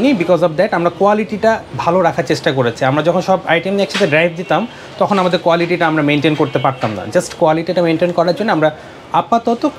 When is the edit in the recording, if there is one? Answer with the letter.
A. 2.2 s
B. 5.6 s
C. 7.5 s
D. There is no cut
D